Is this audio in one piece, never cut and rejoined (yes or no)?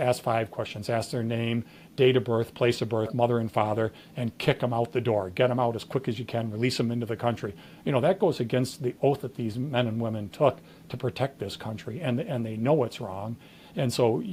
yes